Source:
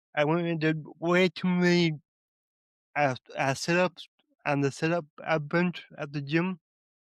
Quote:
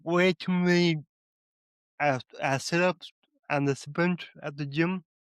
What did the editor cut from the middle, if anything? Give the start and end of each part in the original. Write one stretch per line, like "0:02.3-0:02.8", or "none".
0:04.8-0:05.4